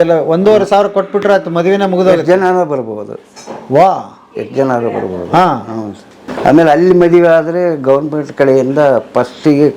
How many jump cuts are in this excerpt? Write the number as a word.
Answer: one